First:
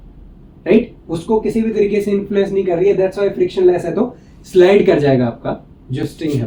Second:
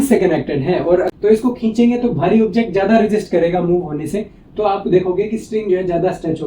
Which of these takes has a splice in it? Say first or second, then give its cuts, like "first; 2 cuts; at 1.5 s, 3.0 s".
second; 1 cut; at 1.1 s